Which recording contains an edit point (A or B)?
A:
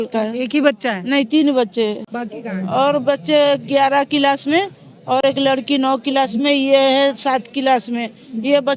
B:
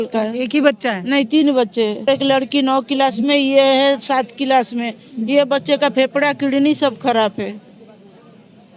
B